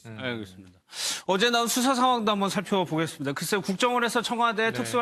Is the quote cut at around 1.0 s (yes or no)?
no